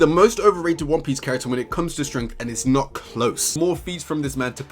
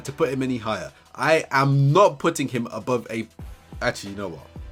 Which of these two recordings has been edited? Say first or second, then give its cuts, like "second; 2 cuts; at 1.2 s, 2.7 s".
first; 1 cut; at 3.5 s